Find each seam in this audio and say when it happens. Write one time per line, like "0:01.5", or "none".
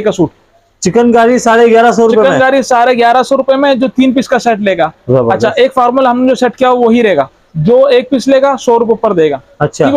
none